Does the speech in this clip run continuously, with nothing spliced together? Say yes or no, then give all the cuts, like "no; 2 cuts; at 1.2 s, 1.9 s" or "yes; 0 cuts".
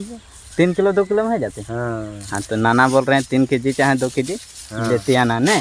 yes; 0 cuts